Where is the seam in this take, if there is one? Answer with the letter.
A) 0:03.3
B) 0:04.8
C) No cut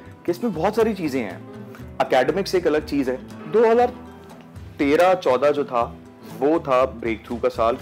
A